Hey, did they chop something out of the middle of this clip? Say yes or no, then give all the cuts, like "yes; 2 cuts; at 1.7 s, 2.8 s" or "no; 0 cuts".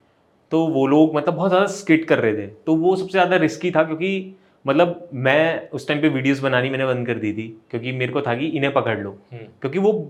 no; 0 cuts